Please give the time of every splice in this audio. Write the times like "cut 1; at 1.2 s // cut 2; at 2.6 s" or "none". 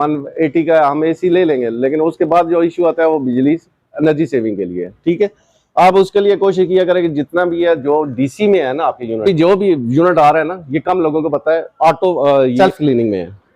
cut 1; at 9.2 s // cut 2; at 12.5 s